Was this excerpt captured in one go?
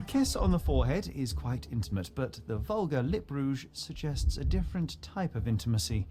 yes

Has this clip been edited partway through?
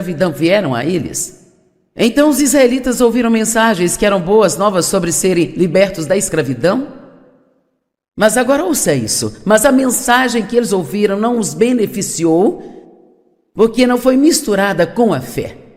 yes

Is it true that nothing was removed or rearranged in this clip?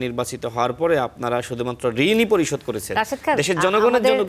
yes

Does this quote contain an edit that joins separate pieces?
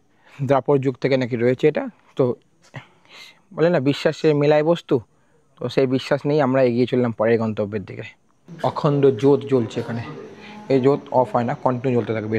yes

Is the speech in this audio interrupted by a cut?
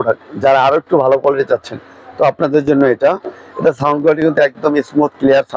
no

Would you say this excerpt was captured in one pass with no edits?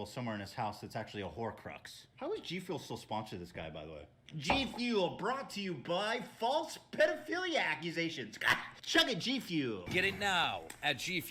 yes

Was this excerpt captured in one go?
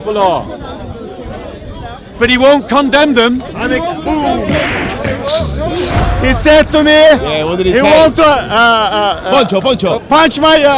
no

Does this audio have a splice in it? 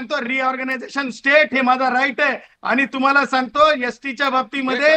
no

